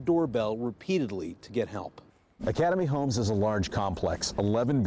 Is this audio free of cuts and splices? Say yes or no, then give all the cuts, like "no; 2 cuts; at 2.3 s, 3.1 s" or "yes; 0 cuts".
no; 1 cut; at 2.1 s